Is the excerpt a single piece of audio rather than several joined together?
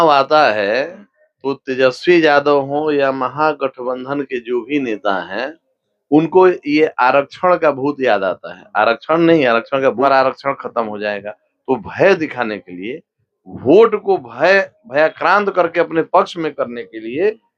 no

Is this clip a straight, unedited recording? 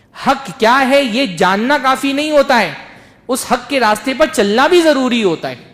yes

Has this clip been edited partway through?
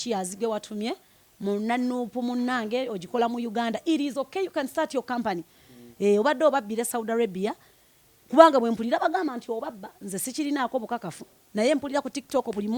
no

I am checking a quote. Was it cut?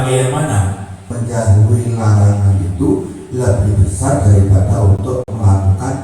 yes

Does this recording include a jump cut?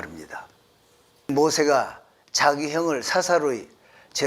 yes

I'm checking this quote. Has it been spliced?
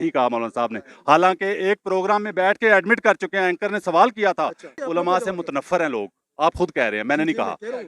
yes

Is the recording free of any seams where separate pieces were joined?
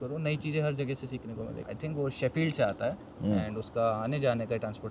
no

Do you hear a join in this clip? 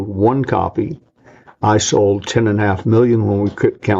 no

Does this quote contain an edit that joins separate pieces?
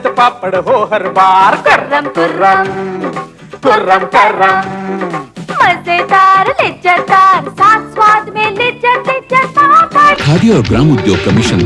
no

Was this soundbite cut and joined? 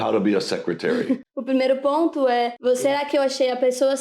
yes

